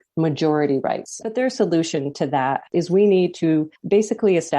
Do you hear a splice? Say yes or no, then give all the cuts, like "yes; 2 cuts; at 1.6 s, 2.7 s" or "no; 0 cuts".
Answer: yes; 2 cuts; at 1.2 s, 2.6 s